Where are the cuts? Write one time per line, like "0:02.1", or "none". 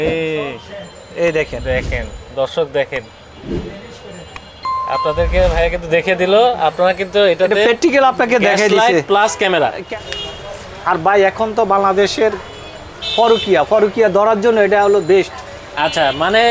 0:09.8